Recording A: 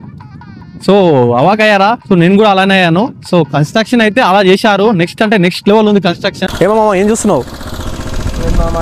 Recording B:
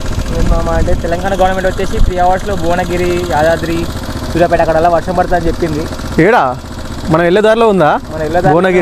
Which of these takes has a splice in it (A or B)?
A